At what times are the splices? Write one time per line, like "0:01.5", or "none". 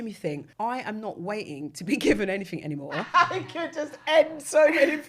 0:03.1